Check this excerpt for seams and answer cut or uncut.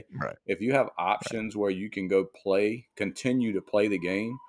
uncut